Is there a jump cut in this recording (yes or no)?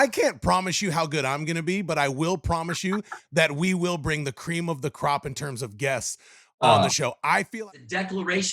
yes